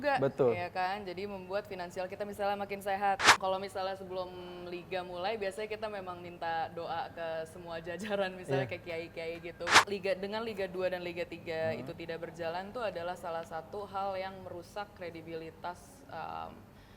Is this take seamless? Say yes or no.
no